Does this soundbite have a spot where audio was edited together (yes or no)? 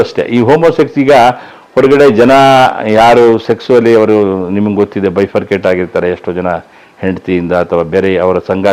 no